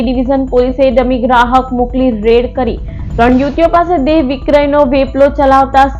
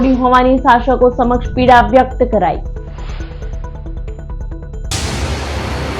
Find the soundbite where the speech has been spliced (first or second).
second